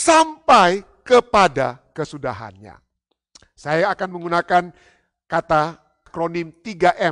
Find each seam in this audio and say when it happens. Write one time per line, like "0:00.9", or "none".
0:06.1

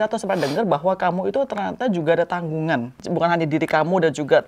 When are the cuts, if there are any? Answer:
0:03.0

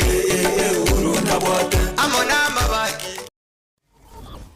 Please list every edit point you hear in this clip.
0:03.3

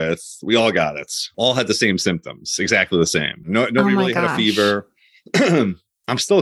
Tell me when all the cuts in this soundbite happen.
0:01.3

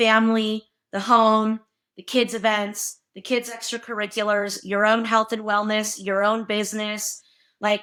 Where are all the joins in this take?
none

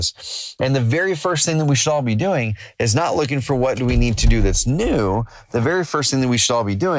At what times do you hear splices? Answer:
none

